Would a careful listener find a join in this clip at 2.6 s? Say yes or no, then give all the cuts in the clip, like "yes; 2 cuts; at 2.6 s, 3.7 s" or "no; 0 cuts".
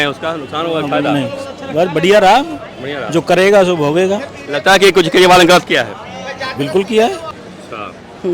no; 1 cut; at 7.3 s